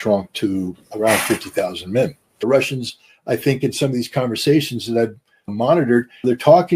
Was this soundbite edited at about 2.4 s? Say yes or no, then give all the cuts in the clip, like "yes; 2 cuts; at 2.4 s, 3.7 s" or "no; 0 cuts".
yes; 1 cut; at 2.4 s